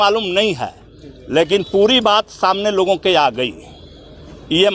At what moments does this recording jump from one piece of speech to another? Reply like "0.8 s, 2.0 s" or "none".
none